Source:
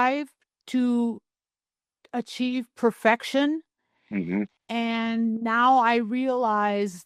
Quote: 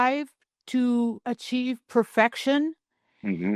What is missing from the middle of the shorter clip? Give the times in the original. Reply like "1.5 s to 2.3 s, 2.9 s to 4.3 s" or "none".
1.2 s to 2.1 s